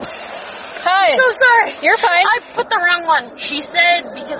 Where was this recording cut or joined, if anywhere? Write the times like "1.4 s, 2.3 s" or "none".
3.4 s